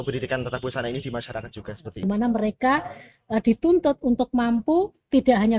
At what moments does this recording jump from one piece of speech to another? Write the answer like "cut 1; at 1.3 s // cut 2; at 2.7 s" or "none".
cut 1; at 2.0 s